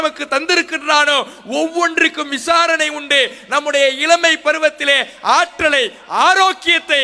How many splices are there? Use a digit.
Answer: 0